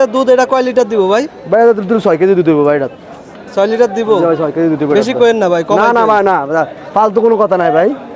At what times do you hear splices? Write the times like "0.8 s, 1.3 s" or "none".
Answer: none

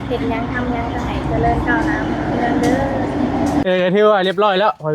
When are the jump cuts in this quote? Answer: 3.6 s

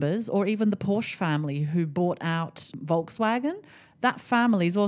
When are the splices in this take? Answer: 2.7 s

